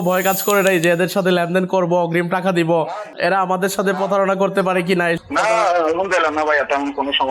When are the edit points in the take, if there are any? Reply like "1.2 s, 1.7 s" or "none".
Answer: 3.0 s